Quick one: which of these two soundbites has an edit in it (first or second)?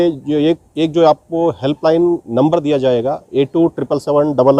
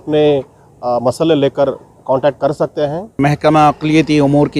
second